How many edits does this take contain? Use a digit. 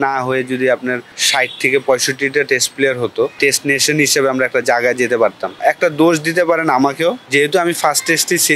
4